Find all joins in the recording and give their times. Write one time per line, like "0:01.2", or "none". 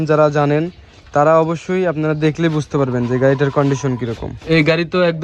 0:04.3